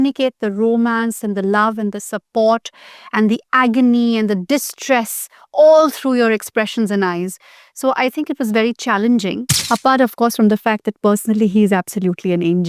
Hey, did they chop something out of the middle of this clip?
yes; 1 cut; at 9.6 s

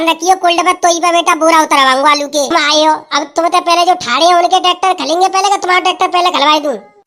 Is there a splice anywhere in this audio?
yes; 1 cut; at 2.5 s

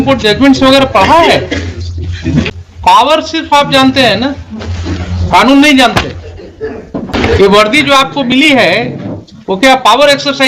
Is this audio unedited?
no; 2 cuts; at 2.5 s, 7.1 s

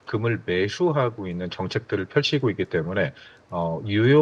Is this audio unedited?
yes; 0 cuts

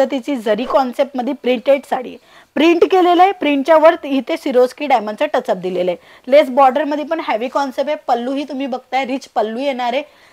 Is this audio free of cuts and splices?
yes; 0 cuts

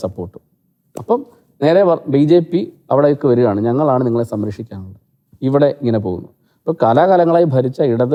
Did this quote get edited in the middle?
no; 0 cuts

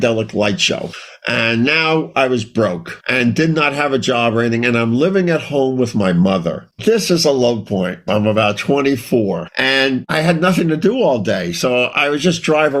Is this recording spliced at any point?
no; 0 cuts

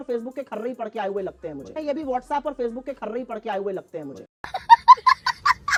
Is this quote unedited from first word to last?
yes; 0 cuts

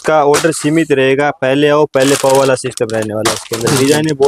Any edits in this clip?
no; 0 cuts

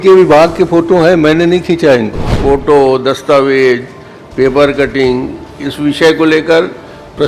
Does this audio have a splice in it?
yes; 1 cut; at 2.3 s

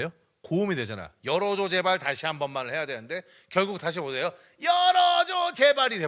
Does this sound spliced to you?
no; 0 cuts

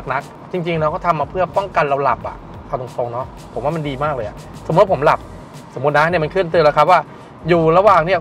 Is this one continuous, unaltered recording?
yes; 0 cuts

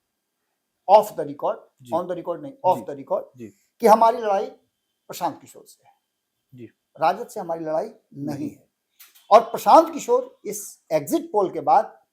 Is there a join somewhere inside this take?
no; 0 cuts

